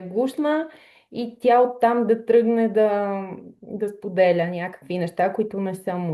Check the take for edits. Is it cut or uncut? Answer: uncut